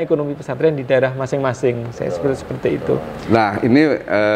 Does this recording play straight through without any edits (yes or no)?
yes